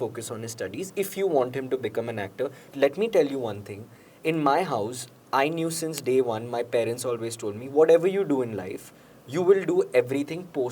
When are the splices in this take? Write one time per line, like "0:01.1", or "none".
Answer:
0:02.7

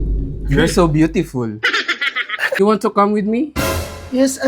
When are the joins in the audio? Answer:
0:02.6

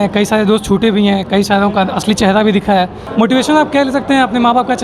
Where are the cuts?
0:03.0

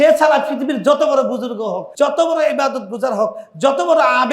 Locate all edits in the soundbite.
0:01.8

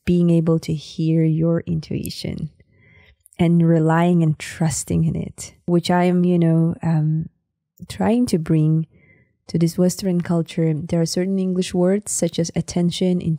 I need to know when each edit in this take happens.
0:05.5

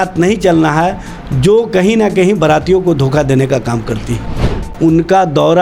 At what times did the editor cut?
0:04.3

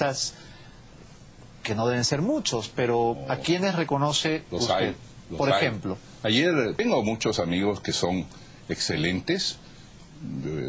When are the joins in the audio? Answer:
0:06.8

